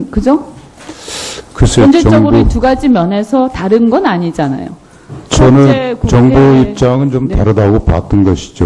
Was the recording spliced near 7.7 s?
no; 1 cut; at 2.5 s

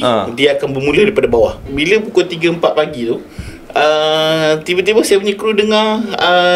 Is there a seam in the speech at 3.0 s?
no; 1 cut; at 1.6 s

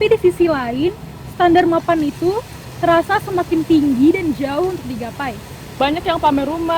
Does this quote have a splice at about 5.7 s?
yes; 1 cut; at 5.7 s

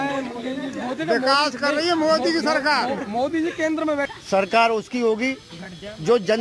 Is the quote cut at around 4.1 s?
yes; 1 cut; at 4.1 s

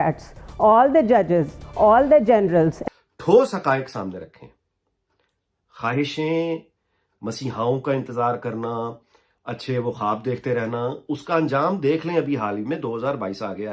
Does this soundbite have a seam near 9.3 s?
no; 1 cut; at 2.8 s

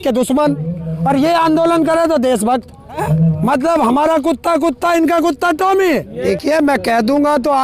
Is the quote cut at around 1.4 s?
no; 2 cuts; at 3.0 s, 6.1 s

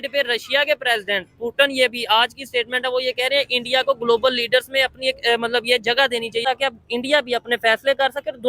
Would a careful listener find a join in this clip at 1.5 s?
no; 1 cut; at 6.4 s

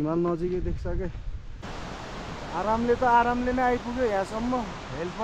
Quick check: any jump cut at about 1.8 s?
yes; 1 cut; at 1.8 s

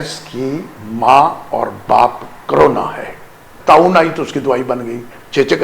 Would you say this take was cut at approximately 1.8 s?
no; 1 cut; at 3.5 s

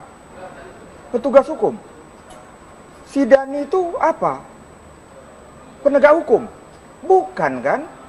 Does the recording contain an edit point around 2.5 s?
no; 0 cuts

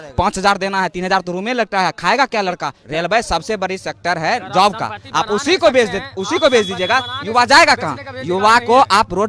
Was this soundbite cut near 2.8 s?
yes; 1 cut; at 2.8 s

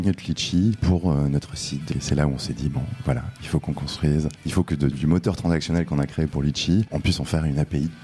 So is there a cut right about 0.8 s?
yes; 4 cuts; at 0.8 s, 1.9 s, 4.4 s, 6.9 s

